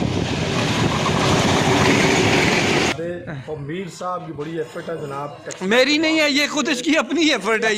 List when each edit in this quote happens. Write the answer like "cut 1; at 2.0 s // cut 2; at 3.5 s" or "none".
cut 1; at 2.9 s